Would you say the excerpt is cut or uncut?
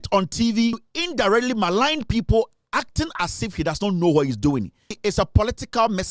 cut